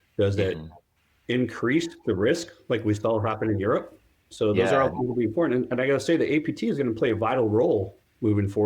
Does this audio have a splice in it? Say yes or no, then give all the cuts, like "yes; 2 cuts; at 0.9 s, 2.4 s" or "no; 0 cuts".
yes; 1 cut; at 4.3 s